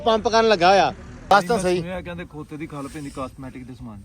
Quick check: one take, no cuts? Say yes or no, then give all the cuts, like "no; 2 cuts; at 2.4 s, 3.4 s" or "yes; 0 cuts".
no; 1 cut; at 1.3 s